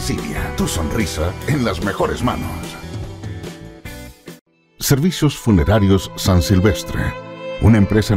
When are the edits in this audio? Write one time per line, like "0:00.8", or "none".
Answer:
0:04.4